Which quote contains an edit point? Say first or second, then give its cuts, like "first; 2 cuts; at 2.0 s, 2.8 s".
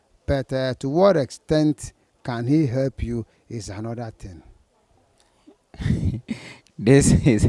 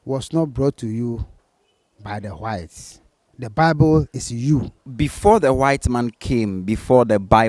second; 1 cut; at 4.9 s